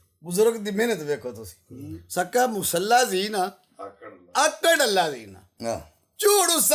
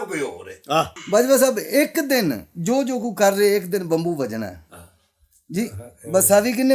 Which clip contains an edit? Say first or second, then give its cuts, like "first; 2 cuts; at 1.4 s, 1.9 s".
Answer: second; 1 cut; at 1.0 s